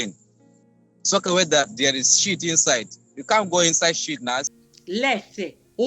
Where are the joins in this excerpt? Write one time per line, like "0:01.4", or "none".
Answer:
0:04.5